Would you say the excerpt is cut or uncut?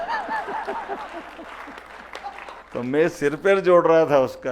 cut